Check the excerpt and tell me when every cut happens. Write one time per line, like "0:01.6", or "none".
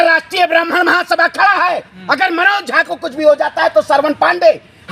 none